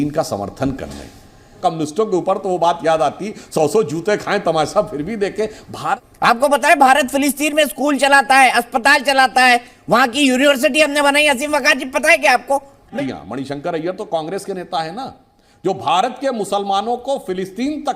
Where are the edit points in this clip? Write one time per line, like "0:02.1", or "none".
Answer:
0:01.6
0:06.0
0:12.9